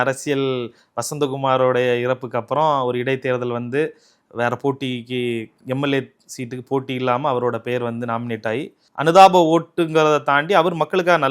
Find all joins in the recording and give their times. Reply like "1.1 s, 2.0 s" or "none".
8.8 s

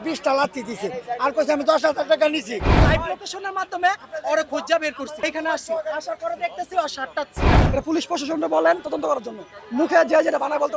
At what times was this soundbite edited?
2.6 s, 5.1 s, 7.6 s

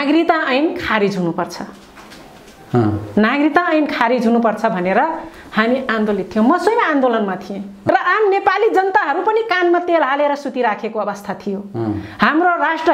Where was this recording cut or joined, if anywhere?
7.9 s

